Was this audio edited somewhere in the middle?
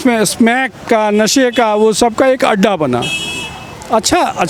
no; 0 cuts

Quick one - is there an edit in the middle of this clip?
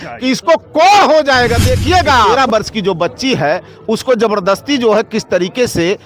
yes; 1 cut; at 2.3 s

